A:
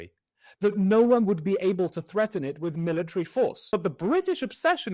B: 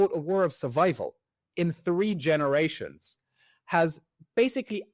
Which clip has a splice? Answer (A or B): A